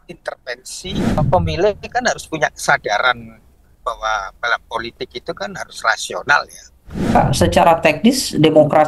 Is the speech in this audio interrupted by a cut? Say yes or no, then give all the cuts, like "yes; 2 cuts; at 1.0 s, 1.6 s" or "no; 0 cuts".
yes; 2 cuts; at 1.2 s, 7.2 s